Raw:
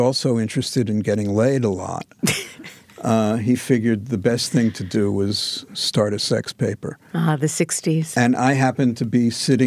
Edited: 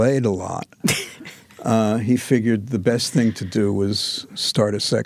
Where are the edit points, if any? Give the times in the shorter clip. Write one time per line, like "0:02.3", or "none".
none